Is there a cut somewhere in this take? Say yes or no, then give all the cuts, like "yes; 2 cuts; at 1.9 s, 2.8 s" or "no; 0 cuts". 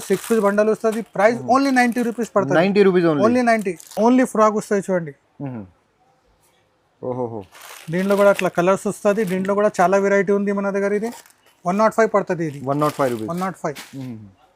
no; 0 cuts